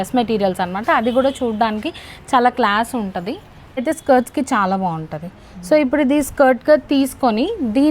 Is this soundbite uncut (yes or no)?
no